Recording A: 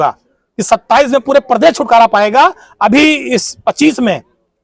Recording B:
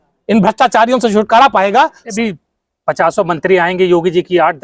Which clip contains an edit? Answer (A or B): B